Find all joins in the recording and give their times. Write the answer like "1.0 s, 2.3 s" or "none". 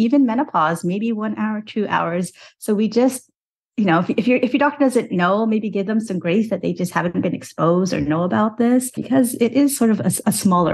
9.0 s